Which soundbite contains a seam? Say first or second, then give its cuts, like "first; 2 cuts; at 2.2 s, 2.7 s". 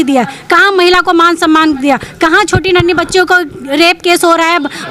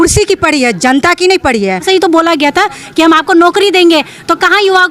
second; 1 cut; at 1.8 s